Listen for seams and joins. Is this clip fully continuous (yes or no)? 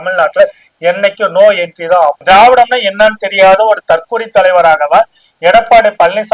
no